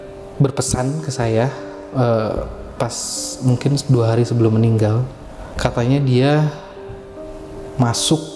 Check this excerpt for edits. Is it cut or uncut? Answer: uncut